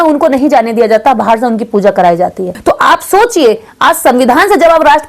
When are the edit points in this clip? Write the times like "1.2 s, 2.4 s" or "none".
2.5 s